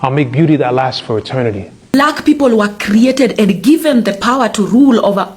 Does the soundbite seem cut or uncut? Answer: cut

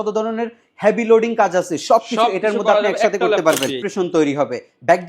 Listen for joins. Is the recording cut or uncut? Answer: cut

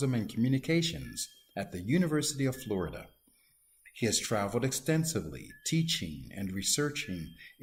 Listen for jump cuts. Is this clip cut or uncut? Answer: uncut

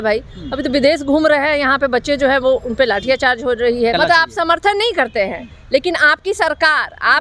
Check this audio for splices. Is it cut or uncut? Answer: cut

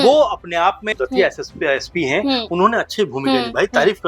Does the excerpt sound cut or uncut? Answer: cut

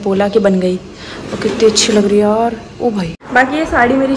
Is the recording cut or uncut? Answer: cut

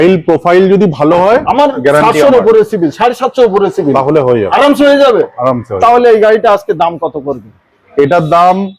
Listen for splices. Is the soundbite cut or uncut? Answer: uncut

